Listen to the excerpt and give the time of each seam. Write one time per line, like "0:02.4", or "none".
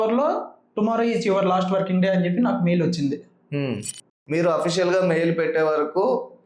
0:04.1